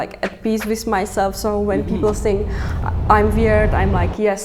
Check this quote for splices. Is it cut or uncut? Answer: uncut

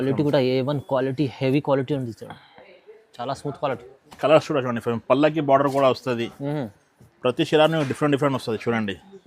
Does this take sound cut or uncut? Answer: uncut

